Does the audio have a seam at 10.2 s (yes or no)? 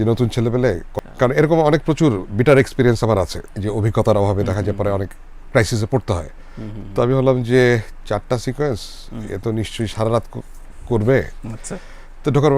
no